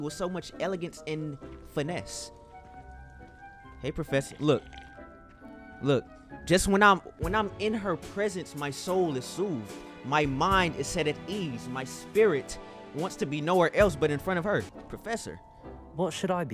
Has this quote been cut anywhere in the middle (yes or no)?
no